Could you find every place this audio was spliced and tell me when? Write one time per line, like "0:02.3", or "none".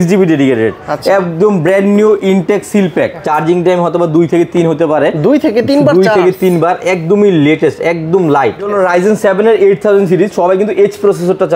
0:03.2
0:08.7